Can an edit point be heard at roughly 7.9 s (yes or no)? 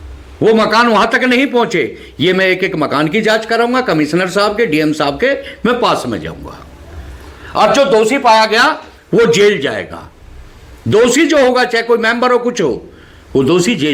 no